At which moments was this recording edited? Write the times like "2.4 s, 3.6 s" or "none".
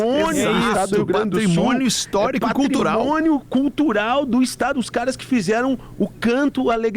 none